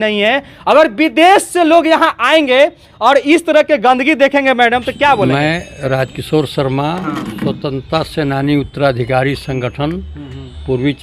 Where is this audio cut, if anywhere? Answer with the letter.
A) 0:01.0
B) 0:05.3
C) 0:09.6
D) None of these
B